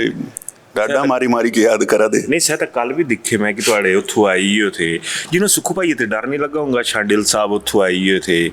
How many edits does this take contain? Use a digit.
0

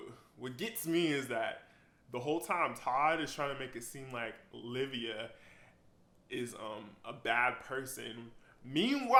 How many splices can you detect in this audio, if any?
0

